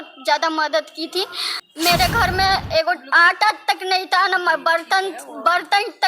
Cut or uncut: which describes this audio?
cut